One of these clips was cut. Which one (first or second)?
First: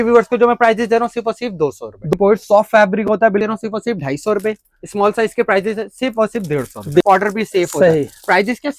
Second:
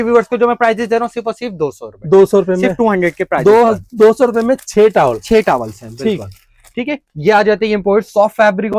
first